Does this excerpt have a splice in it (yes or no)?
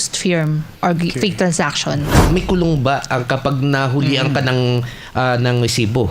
yes